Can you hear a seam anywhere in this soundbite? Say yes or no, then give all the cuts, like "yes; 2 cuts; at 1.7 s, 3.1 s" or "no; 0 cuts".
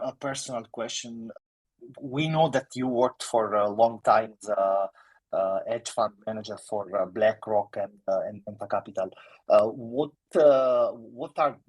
yes; 1 cut; at 1.3 s